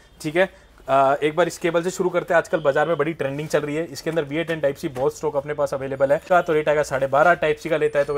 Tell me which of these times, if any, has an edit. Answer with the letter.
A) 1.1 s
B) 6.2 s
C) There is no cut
B